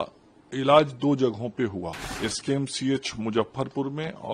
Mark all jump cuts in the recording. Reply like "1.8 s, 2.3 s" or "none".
2.0 s